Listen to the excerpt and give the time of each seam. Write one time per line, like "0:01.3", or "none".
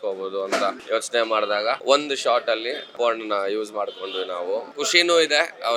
0:00.8
0:01.8
0:02.9
0:04.7